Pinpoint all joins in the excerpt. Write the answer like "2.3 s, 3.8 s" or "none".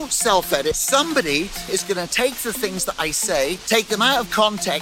0.8 s, 3.6 s